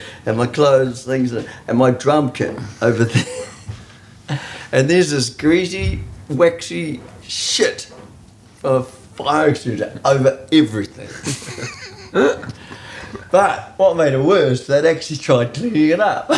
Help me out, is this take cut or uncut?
uncut